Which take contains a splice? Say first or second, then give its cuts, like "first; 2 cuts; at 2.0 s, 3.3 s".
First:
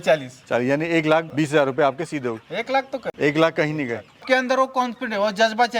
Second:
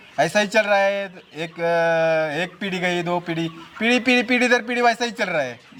first; 3 cuts; at 1.3 s, 3.1 s, 4.2 s